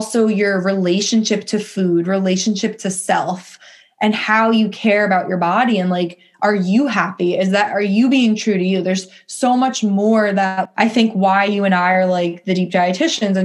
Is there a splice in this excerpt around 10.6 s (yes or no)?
yes